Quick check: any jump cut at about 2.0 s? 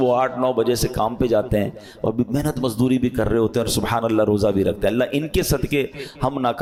no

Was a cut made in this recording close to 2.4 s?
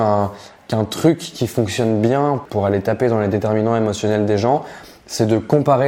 yes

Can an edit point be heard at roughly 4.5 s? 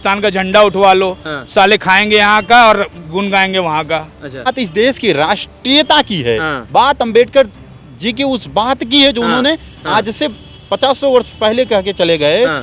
yes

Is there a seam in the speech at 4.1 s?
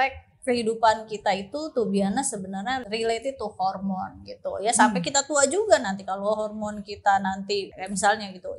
no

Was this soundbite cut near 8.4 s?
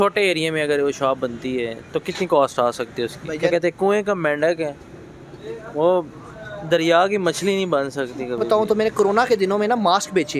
yes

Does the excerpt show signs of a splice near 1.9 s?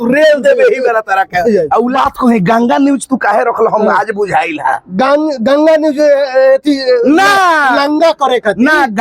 yes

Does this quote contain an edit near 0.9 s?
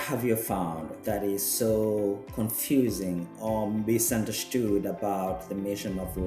yes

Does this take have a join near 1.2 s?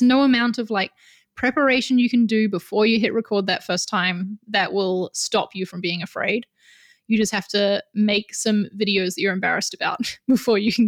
no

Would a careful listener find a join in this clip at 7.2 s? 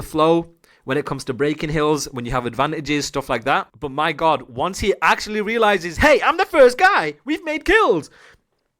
no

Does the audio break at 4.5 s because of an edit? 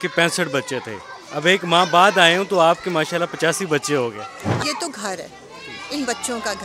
yes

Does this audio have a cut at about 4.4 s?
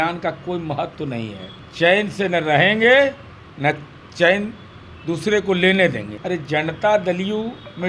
no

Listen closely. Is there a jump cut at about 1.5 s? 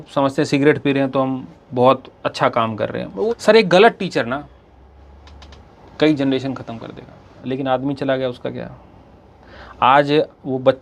no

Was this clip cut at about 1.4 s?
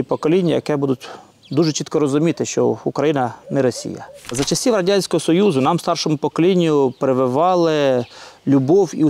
no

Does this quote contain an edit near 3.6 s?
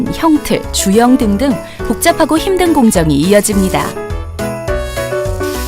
yes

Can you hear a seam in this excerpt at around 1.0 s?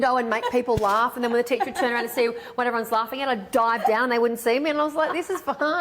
no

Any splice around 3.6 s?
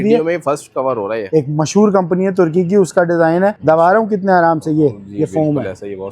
yes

